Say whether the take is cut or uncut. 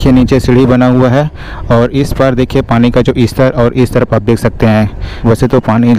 uncut